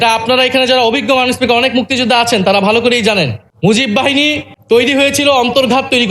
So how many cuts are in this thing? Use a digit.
2